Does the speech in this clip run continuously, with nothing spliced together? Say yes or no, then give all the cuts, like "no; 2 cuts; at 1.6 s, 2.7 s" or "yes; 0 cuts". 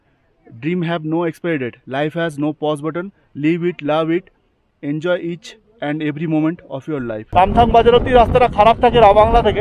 no; 1 cut; at 7.2 s